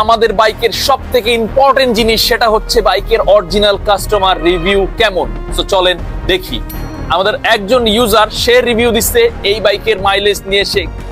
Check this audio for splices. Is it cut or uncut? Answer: uncut